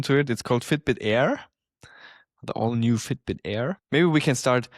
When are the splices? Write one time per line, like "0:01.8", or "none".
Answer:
0:03.8